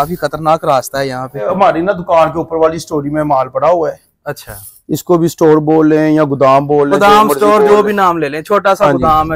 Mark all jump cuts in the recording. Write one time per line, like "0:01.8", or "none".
0:01.5